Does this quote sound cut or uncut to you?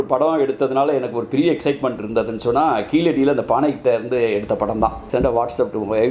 cut